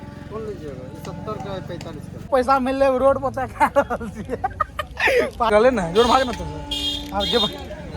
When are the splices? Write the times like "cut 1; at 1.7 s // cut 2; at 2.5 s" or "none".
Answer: cut 1; at 2.1 s // cut 2; at 5.5 s